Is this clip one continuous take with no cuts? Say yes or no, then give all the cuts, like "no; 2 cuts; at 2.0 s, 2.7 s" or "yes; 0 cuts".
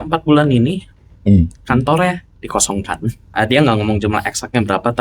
no; 1 cut; at 3.3 s